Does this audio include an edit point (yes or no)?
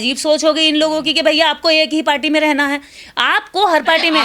no